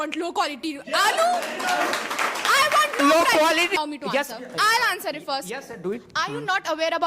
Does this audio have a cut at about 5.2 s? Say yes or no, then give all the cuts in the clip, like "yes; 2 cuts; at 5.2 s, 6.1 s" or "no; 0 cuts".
no; 1 cut; at 3.7 s